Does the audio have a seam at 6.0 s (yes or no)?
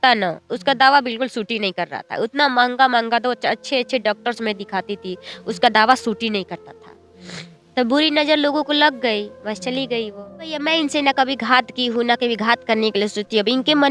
no